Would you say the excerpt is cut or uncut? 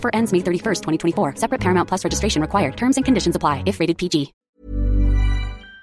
cut